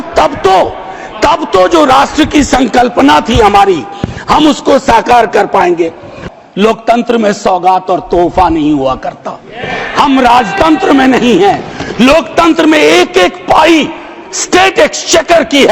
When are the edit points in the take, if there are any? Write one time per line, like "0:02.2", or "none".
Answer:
0:06.2